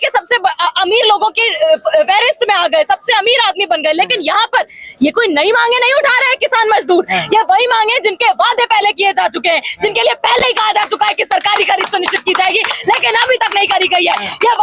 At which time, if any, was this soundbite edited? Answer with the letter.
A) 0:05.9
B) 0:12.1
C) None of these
C